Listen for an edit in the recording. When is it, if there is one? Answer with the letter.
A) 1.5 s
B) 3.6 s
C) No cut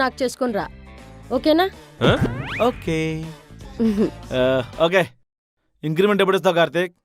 C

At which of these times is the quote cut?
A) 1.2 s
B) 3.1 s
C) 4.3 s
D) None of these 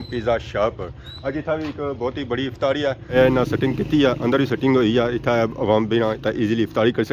B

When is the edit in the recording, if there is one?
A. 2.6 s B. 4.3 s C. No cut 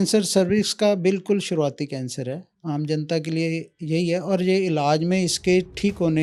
C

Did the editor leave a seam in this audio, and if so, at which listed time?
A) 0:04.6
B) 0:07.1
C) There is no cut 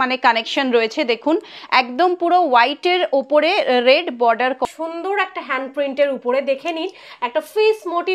A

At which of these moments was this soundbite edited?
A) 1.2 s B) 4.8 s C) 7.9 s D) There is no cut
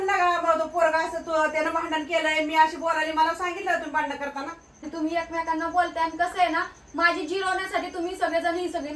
B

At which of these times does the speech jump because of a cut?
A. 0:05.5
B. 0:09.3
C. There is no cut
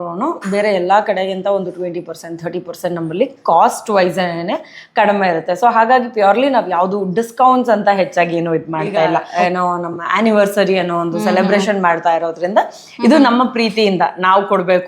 B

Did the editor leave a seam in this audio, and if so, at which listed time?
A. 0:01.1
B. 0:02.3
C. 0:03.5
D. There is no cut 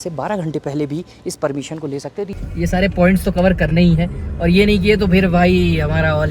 B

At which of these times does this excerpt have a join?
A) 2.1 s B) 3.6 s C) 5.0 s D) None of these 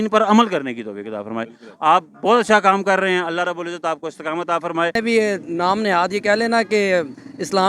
C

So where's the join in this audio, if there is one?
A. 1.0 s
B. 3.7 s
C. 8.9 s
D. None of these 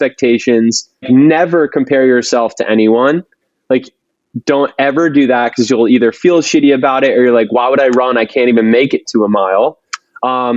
A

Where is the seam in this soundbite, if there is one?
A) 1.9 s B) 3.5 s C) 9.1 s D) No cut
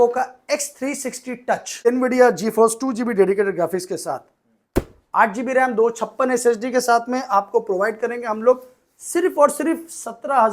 A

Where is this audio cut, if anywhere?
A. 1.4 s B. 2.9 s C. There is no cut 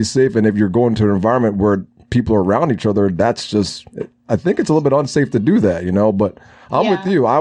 C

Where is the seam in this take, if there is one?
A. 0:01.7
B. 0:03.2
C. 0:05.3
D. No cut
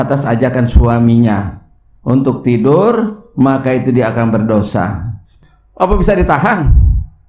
C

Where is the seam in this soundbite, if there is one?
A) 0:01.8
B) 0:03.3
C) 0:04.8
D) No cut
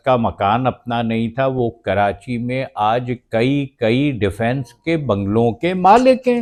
D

